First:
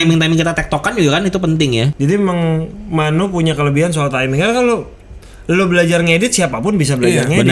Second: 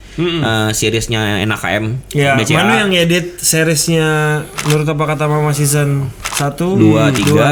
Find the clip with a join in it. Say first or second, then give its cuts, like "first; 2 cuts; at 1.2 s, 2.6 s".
first; 1 cut; at 1.9 s